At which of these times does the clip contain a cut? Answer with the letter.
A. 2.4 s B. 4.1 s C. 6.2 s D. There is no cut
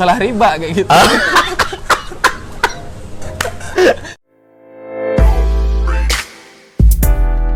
B